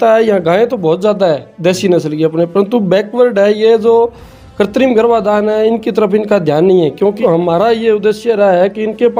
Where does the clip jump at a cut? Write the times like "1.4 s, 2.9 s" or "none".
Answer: 7.2 s